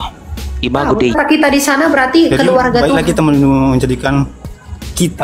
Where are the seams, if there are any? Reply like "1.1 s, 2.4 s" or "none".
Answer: 1.2 s